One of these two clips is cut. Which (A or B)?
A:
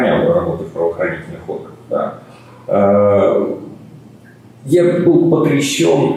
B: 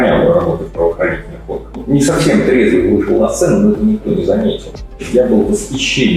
B